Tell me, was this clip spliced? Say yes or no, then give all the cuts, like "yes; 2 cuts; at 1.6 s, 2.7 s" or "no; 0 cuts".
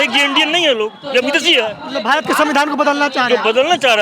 no; 0 cuts